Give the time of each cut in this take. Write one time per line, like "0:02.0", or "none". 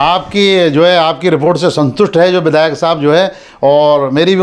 none